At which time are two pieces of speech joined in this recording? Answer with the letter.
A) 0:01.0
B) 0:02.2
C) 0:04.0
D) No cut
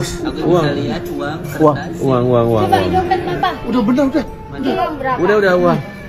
D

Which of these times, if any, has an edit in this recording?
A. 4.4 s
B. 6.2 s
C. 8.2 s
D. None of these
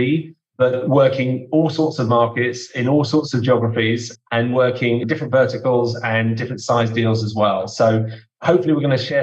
D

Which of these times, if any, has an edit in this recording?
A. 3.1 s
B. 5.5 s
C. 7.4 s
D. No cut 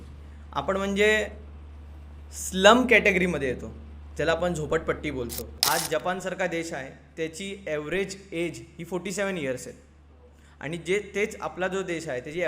B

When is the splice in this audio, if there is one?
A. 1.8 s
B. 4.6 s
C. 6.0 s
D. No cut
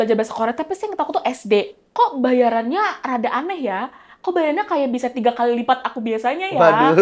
A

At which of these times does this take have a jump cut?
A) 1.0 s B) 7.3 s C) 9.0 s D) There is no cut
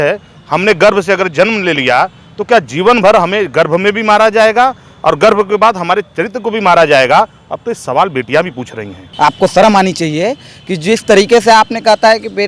C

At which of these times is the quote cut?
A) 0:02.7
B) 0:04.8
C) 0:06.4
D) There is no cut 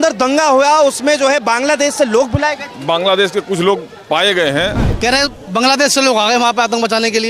B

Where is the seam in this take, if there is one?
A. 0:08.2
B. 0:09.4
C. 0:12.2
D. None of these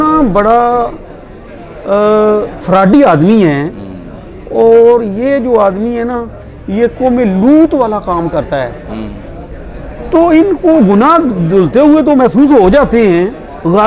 D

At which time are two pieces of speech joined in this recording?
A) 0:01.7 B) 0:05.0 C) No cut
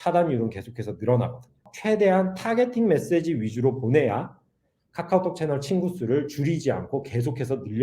A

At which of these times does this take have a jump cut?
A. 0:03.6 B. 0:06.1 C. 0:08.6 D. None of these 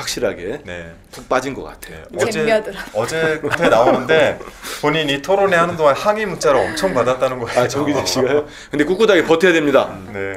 A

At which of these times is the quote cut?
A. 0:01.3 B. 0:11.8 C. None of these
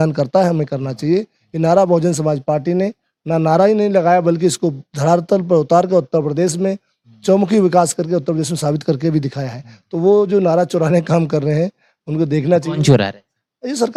C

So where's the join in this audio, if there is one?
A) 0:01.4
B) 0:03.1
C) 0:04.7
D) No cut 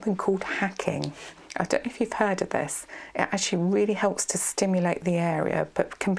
A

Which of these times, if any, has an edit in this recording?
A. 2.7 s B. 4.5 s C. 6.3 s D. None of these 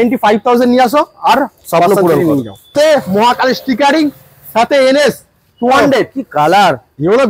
A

